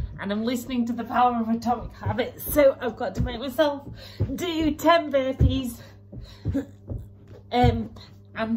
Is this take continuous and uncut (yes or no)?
yes